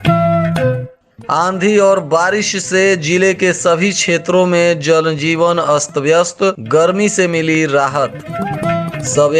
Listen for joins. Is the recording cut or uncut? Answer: cut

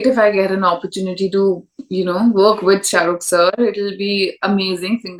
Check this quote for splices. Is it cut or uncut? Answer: uncut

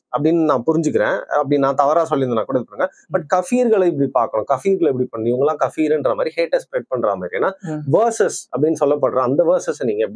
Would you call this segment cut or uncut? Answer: uncut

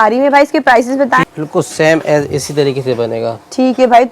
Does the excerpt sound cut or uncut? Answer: cut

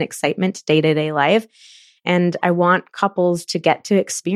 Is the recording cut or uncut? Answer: uncut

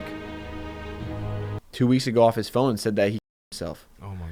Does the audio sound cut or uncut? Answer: uncut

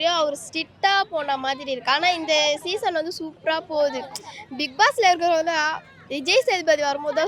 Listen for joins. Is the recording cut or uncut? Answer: uncut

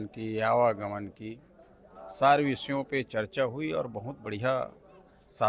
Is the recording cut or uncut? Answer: uncut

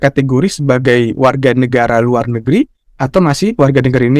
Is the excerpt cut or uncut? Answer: uncut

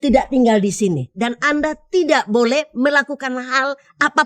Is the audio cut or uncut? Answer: uncut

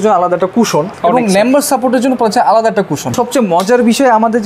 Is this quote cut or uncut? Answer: cut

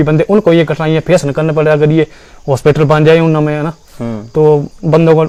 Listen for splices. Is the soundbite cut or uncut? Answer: uncut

